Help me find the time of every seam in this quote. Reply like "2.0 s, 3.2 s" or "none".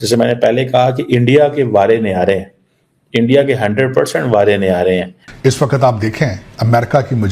5.2 s